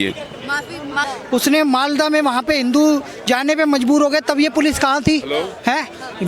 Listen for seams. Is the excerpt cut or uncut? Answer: cut